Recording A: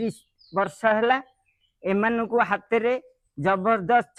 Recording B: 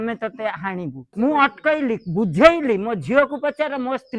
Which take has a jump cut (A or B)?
B